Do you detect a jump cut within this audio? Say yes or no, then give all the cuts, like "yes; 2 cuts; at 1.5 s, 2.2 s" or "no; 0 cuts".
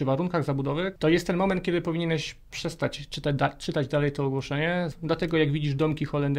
yes; 2 cuts; at 0.9 s, 4.9 s